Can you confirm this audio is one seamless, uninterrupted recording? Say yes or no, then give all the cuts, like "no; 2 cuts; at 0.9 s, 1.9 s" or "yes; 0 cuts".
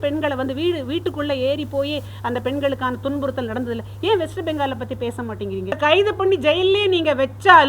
no; 1 cut; at 5.8 s